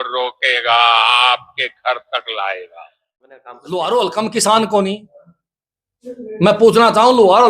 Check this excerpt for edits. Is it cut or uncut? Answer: cut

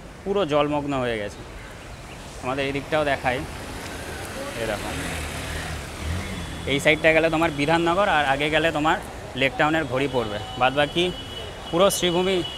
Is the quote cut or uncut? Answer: uncut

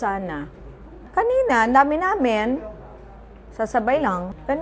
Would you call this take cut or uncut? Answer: uncut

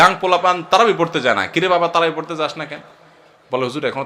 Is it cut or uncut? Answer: uncut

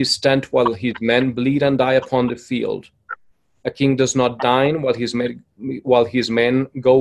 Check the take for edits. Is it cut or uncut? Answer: uncut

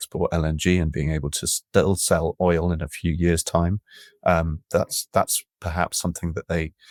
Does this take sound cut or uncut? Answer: uncut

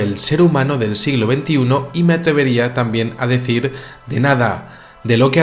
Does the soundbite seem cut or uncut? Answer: uncut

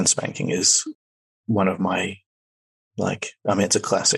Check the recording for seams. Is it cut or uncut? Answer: uncut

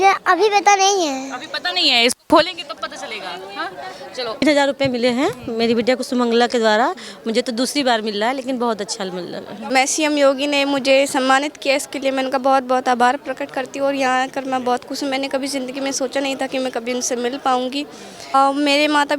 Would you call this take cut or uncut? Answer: cut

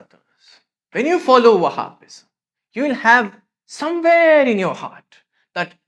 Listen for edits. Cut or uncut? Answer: uncut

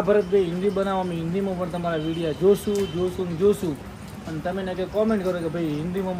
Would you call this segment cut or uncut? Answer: uncut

